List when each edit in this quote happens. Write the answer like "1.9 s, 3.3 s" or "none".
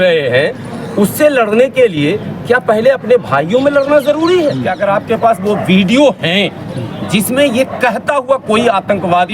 4.6 s